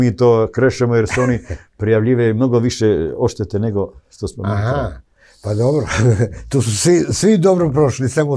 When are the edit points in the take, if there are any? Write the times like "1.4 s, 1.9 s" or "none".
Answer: none